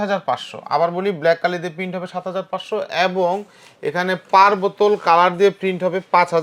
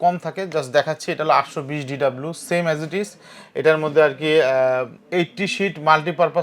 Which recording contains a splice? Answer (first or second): second